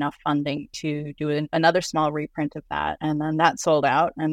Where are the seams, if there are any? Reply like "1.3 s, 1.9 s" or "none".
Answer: 1.5 s, 3.0 s